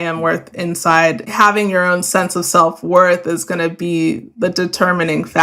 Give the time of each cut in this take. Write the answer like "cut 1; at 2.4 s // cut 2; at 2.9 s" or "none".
cut 1; at 1.3 s